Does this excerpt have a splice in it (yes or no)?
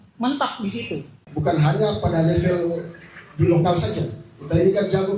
yes